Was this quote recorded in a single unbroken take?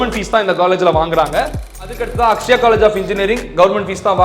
no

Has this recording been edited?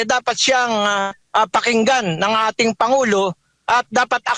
no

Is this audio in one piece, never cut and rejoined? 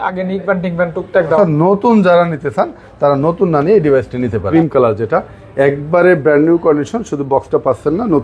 no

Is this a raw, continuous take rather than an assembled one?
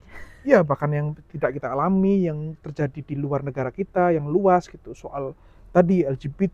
yes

